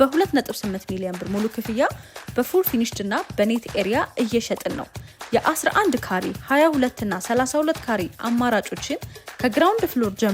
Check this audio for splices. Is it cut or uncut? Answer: uncut